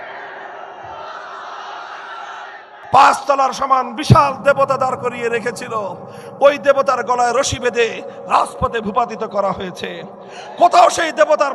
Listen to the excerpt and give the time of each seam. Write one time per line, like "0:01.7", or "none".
0:02.8